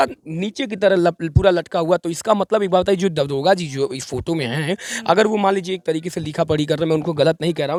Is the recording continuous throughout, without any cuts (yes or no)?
yes